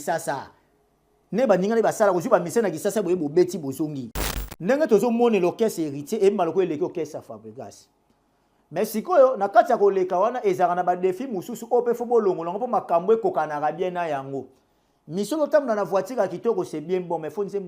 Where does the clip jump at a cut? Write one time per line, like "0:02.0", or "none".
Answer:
0:04.0